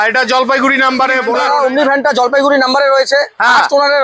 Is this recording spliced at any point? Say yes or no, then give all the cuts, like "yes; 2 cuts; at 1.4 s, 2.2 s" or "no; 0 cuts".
yes; 1 cut; at 1.4 s